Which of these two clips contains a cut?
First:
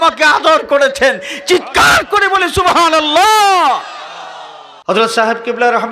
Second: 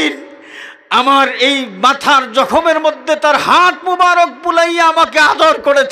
first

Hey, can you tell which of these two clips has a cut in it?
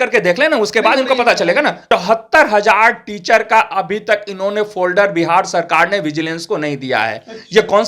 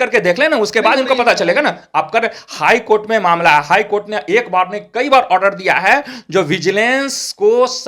first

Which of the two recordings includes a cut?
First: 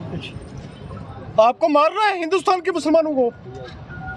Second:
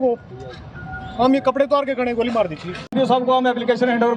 second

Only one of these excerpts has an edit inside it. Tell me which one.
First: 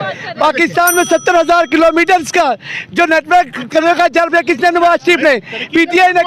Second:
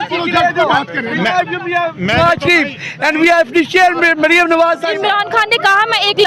second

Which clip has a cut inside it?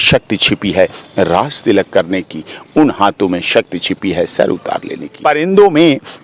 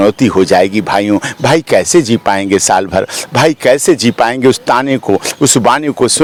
first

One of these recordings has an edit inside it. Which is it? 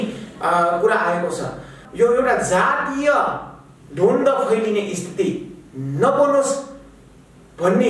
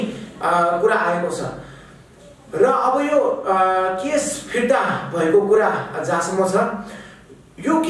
first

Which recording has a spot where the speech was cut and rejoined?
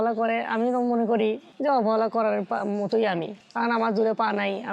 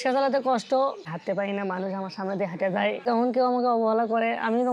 second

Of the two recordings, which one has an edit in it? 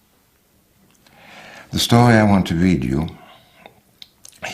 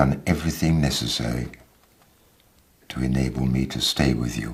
first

